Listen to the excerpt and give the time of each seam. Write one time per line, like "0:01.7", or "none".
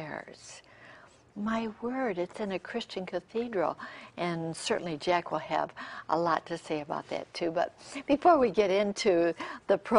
0:05.9